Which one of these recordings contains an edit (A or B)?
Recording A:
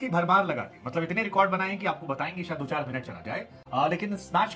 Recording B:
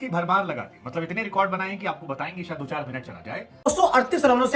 B